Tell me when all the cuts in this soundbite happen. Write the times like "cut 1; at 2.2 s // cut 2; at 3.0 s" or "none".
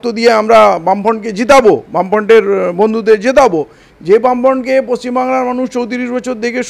none